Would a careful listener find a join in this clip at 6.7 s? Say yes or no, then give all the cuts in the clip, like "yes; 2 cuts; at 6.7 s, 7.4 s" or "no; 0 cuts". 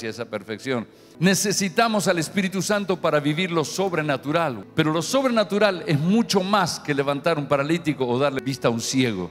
no; 3 cuts; at 1.0 s, 4.6 s, 8.4 s